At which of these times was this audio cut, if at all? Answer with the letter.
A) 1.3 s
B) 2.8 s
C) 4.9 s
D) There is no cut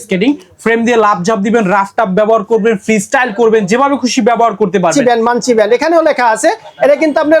C